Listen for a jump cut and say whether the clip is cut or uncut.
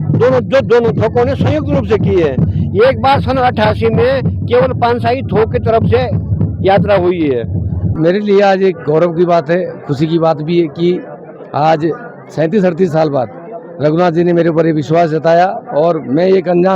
cut